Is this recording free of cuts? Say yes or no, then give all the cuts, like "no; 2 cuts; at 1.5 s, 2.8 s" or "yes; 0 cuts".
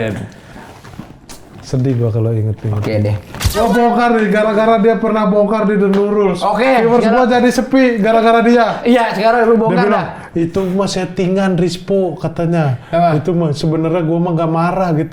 no; 1 cut; at 3.5 s